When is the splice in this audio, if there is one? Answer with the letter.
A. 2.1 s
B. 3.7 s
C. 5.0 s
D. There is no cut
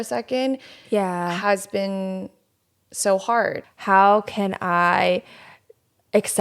B